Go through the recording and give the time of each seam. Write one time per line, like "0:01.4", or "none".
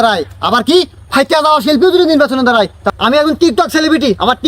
0:02.8